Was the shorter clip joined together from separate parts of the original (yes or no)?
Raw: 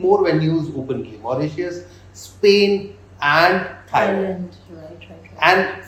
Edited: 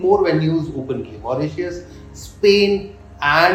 no